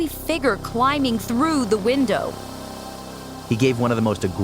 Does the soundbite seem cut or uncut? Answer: cut